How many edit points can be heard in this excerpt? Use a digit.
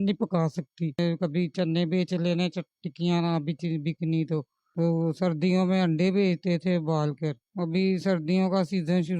1